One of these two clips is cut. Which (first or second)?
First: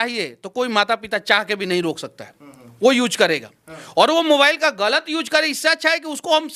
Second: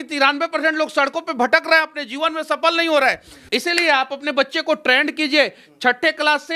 second